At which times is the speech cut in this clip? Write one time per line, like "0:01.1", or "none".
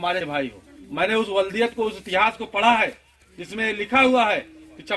none